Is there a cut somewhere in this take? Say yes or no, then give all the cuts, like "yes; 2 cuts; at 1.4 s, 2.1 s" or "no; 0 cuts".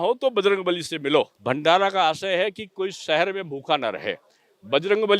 yes; 1 cut; at 1.4 s